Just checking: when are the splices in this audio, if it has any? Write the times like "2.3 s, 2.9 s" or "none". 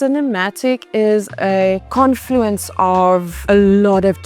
1.9 s, 3.3 s